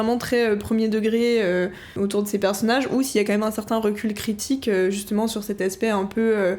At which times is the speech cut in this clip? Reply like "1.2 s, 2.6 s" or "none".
1.9 s